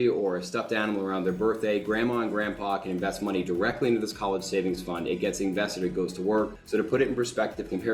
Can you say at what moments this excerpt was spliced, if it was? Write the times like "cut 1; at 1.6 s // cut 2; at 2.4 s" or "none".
cut 1; at 6.6 s